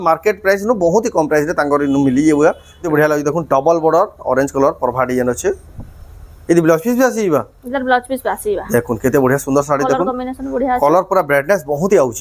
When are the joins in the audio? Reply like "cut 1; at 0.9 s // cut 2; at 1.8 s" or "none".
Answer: cut 1; at 2.9 s